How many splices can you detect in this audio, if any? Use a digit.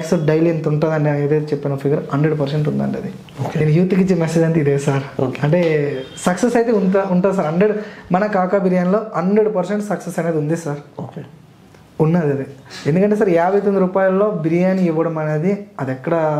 0